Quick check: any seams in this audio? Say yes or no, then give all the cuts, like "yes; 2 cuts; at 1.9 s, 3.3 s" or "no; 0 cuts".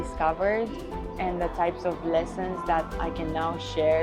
no; 0 cuts